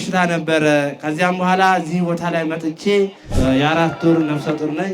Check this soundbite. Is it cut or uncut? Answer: cut